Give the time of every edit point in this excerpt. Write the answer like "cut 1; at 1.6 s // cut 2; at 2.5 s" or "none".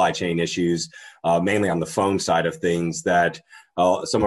none